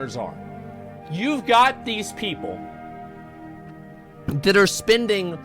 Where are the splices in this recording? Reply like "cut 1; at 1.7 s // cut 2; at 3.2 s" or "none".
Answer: cut 1; at 0.9 s